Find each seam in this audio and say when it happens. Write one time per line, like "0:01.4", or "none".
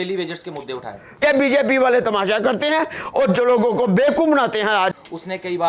0:01.2
0:04.9